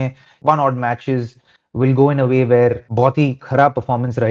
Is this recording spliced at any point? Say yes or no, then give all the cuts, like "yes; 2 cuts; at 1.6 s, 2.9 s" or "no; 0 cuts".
yes; 1 cut; at 2.8 s